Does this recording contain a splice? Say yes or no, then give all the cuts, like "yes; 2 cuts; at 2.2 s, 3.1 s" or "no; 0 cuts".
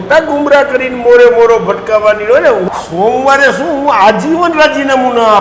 yes; 1 cut; at 2.7 s